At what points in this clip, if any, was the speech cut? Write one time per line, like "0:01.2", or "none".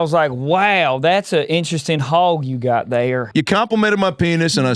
0:03.3